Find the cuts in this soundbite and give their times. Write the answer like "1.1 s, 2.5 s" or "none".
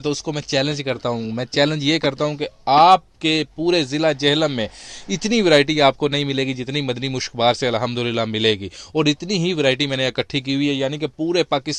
none